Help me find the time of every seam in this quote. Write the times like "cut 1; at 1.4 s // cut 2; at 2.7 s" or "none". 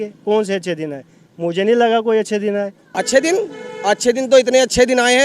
cut 1; at 2.8 s